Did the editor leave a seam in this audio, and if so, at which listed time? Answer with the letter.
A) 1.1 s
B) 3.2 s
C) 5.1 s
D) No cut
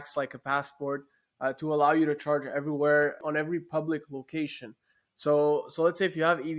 B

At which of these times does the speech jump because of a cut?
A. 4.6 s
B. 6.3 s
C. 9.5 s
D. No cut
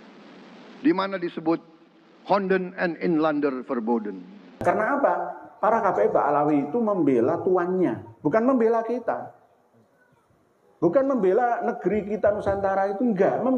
A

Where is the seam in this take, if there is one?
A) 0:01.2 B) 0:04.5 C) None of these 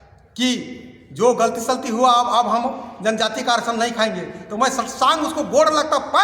C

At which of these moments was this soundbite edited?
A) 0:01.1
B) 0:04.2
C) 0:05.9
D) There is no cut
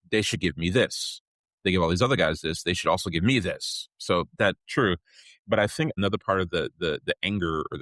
C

